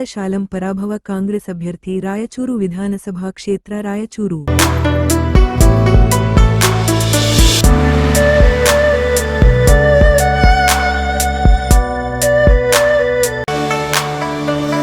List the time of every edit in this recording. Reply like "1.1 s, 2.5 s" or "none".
none